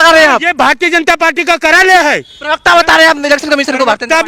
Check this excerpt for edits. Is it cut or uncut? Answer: uncut